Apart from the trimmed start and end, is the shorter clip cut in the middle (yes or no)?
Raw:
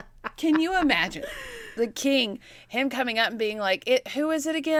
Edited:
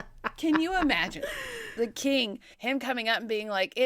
yes